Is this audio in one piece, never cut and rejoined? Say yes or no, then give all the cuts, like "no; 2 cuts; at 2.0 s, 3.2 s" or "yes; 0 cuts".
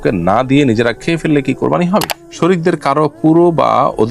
no; 1 cut; at 2.1 s